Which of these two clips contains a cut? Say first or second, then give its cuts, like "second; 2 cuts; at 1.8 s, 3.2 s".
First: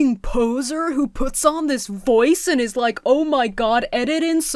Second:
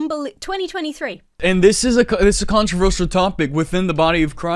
second; 1 cut; at 1.3 s